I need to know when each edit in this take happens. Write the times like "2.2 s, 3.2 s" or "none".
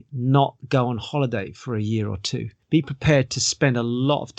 2.5 s